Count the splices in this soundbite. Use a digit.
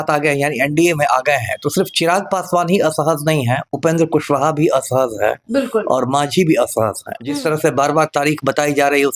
1